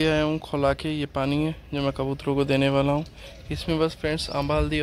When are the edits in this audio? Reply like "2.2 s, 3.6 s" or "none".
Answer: none

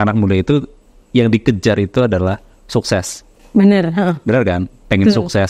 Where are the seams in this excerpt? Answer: none

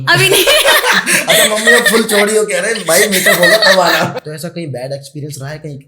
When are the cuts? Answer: 4.2 s

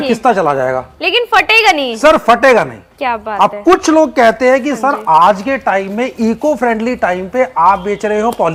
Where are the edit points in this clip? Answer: none

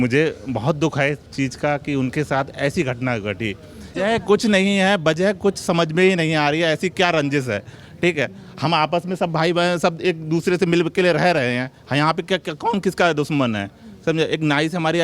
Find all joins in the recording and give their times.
3.9 s

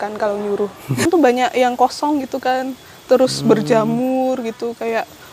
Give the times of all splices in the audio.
1.0 s

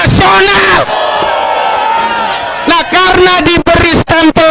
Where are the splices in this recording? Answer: none

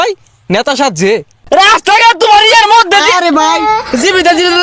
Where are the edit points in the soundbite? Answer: 1.3 s

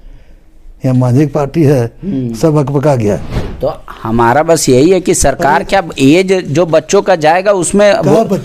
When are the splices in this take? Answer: 3.4 s

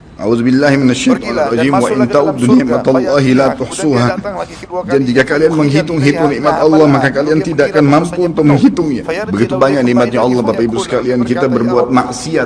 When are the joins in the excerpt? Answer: none

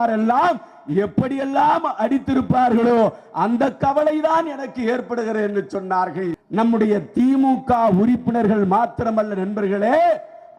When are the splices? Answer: 6.4 s

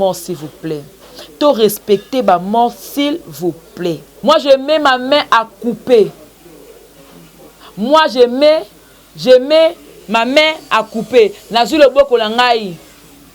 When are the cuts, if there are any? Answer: 4.1 s

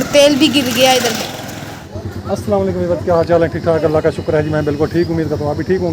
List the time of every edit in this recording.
1.8 s

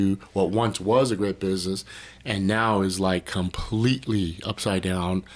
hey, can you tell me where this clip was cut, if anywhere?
none

